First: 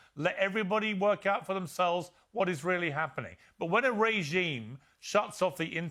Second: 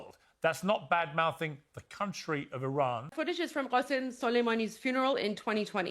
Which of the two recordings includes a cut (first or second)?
second